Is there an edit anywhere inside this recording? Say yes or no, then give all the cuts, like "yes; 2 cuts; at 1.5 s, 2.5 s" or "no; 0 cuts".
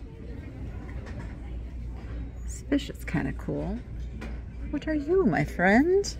no; 0 cuts